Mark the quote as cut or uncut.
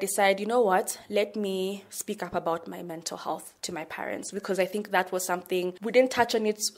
cut